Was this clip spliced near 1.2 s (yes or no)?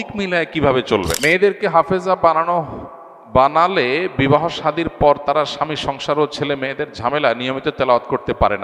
yes